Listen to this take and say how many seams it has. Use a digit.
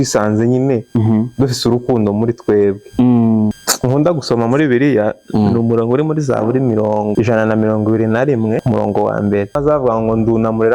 4